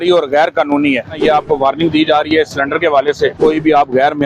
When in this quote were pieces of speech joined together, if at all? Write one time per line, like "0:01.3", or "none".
0:01.2
0:03.4